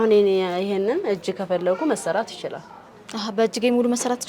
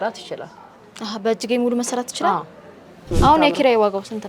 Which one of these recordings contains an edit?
second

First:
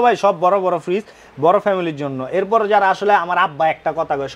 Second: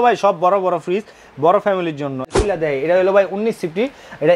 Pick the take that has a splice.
second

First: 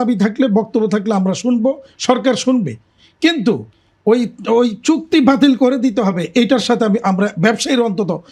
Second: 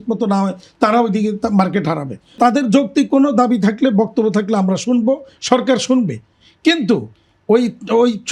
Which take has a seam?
second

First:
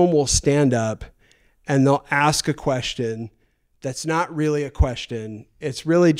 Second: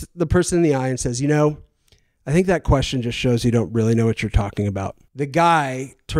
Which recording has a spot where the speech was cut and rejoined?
second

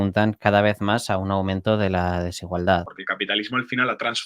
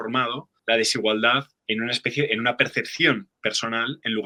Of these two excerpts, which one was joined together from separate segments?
first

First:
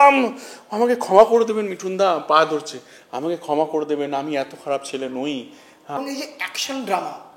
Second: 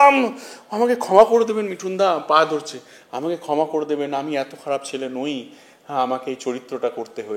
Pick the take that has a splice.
first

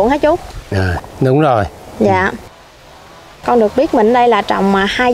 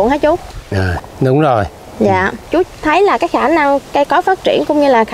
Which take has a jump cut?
second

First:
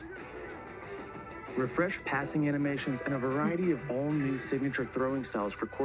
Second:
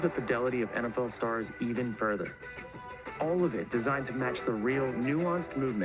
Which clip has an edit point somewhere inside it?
first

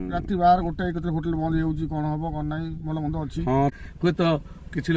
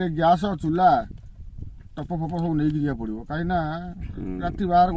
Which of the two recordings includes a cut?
first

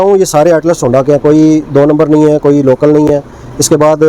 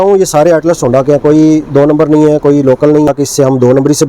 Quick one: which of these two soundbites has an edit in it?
second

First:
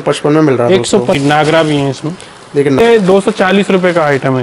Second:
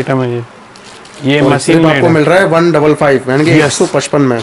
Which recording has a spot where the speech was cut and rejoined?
first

